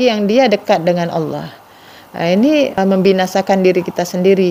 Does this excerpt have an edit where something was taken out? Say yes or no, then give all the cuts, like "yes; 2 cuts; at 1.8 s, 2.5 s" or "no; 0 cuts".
yes; 1 cut; at 2.8 s